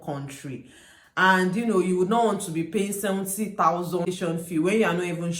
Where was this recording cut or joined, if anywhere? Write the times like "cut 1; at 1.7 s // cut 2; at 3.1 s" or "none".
cut 1; at 4.0 s